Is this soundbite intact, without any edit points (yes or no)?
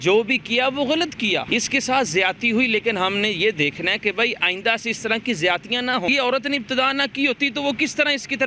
no